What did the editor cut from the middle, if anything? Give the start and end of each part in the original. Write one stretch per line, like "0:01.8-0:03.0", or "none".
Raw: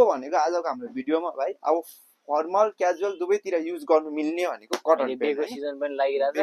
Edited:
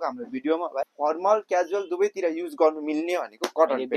0:01.5-0:02.2